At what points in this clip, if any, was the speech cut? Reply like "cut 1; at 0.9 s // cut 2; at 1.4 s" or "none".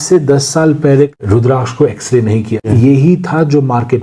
cut 1; at 1.1 s // cut 2; at 2.7 s